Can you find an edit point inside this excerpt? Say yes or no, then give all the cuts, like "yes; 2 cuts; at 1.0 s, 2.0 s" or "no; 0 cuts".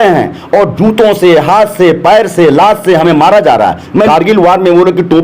yes; 1 cut; at 4.1 s